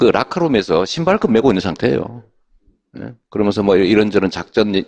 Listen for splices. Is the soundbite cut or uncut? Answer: cut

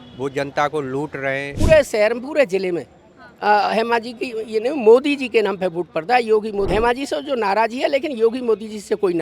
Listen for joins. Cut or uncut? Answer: cut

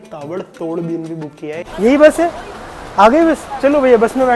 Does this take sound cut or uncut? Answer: cut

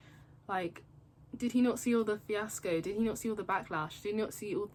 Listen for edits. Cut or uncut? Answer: uncut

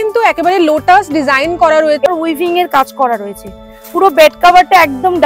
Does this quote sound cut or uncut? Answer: cut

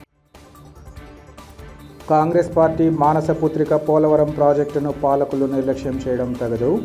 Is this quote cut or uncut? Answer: cut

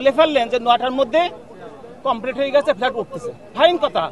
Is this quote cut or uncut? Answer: uncut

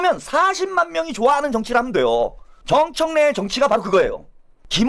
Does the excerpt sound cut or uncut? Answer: cut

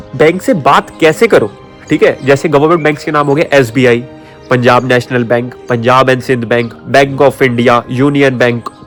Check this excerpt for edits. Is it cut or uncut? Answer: uncut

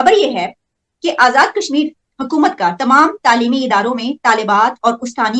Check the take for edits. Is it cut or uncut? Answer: uncut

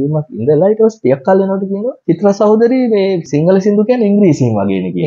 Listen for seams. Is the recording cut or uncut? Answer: cut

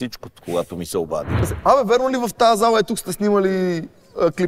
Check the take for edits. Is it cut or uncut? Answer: cut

